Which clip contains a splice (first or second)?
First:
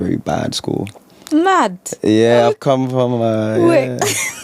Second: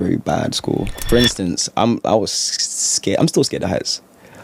second